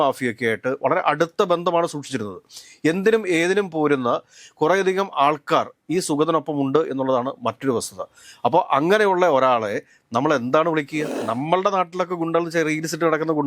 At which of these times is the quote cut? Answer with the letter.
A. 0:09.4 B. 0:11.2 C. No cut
B